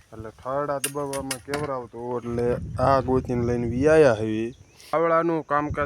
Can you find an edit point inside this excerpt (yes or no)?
yes